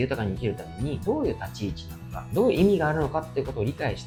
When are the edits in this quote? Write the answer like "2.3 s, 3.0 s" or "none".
none

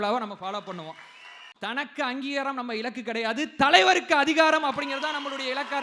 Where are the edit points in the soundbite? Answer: 1.4 s

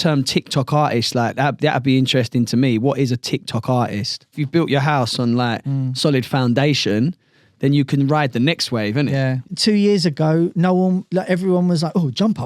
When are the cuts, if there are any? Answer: 4.3 s, 9.5 s

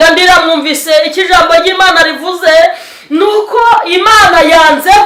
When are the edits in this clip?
none

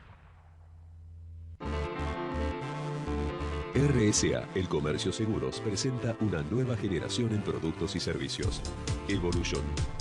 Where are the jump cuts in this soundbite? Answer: 1.5 s

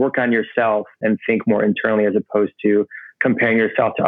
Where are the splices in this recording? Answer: 1.0 s

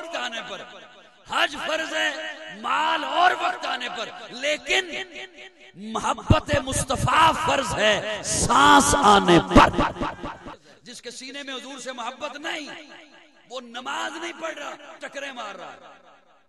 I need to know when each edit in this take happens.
10.6 s

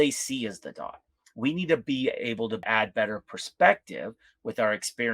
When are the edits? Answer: 2.6 s

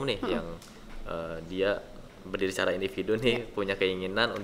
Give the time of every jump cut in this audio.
none

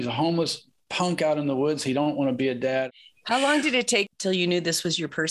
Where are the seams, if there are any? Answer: 2.9 s, 4.1 s

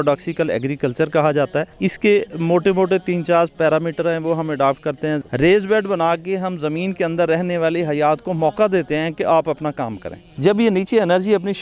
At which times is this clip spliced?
1.7 s, 5.2 s, 10.2 s

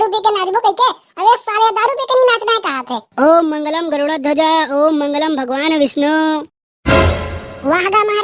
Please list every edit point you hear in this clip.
3.1 s

